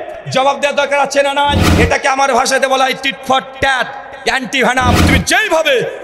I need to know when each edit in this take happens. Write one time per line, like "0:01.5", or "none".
0:01.7
0:05.0